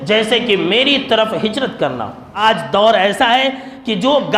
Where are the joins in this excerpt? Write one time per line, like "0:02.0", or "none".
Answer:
0:02.2